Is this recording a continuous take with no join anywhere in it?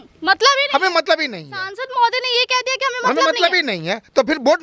yes; 0 cuts

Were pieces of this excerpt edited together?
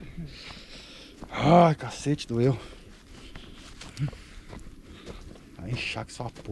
no; 0 cuts

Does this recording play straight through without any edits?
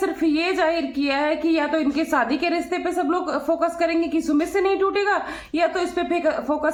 yes; 0 cuts

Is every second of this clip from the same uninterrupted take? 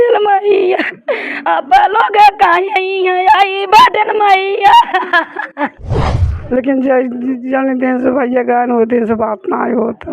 no; 1 cut; at 5.9 s

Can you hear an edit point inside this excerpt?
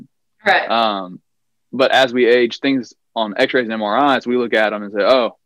no; 0 cuts

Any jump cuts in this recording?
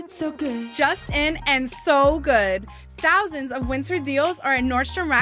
no; 0 cuts

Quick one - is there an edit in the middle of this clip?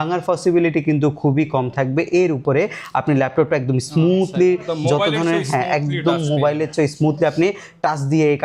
no; 0 cuts

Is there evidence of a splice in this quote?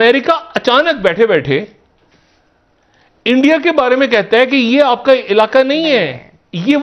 no; 0 cuts

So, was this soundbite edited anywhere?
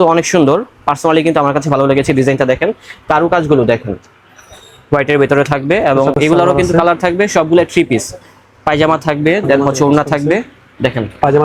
no; 0 cuts

